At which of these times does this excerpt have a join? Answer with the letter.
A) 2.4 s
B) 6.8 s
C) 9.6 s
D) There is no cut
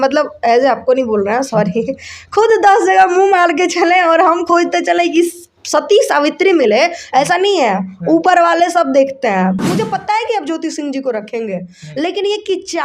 C